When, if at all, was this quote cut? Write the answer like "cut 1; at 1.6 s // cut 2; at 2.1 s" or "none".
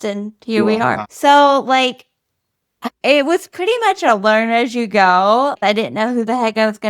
cut 1; at 1.1 s // cut 2; at 5.6 s